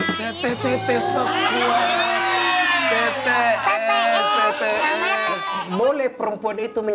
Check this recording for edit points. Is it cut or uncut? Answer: cut